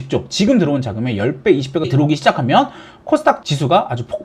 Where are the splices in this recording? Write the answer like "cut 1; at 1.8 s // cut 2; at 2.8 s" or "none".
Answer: cut 1; at 1.9 s

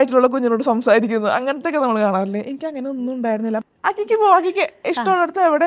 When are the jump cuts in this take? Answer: cut 1; at 3.6 s

